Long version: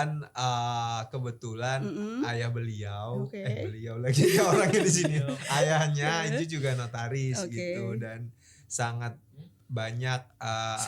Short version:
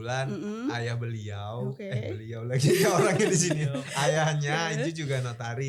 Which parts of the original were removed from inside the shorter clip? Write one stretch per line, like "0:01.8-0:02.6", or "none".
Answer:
none